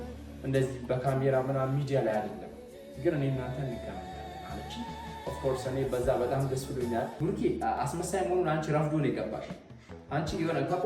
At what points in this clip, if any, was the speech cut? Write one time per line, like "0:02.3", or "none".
0:07.1